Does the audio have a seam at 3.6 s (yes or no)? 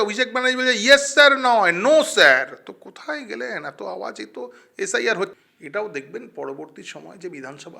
no